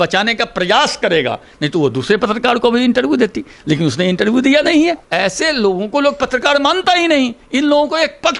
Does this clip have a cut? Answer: yes; 1 cut; at 5.0 s

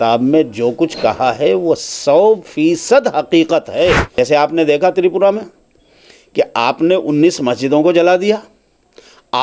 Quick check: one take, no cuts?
no; 1 cut; at 4.1 s

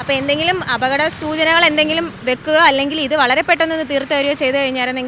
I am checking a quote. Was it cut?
no; 0 cuts

